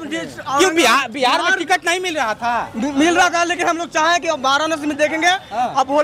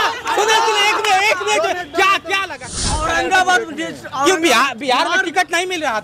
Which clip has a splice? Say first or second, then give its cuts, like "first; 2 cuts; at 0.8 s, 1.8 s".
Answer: second; 1 cut; at 2.7 s